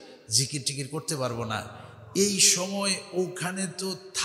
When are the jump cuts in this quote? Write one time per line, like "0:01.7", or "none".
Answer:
none